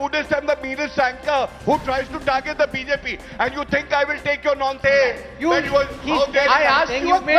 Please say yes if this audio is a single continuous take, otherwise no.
no